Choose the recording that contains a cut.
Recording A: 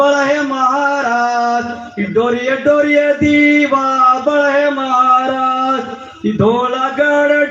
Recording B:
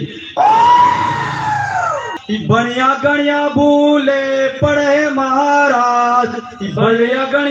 B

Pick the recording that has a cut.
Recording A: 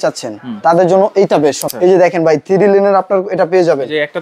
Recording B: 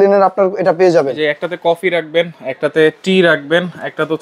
A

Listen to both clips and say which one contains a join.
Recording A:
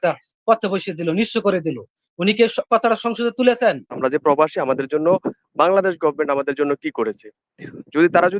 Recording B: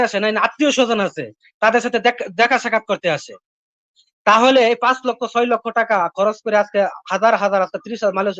A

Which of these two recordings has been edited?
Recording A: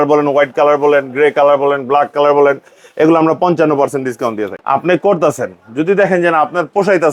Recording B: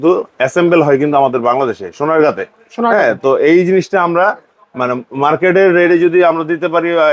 A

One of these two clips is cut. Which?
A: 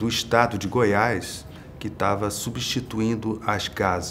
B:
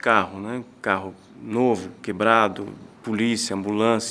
A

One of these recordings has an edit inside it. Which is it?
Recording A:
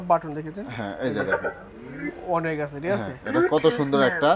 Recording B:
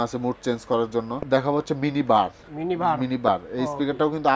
B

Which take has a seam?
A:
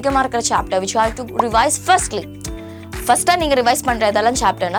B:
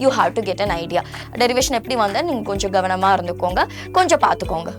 B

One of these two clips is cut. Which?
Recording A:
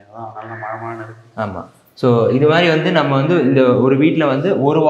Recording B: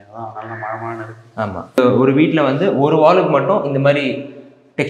B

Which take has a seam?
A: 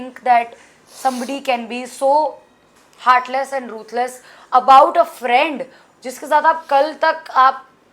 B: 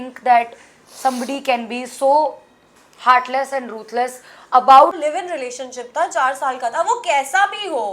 B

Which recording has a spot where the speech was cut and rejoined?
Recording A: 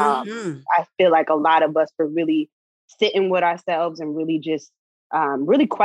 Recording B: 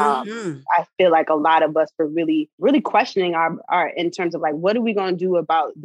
B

